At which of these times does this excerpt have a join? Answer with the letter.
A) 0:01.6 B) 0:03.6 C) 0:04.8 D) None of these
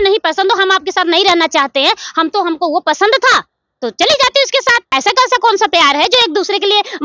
C